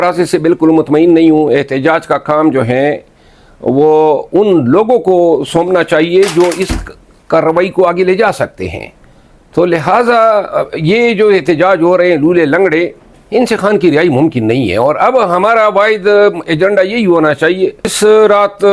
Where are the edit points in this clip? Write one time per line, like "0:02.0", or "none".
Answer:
0:17.8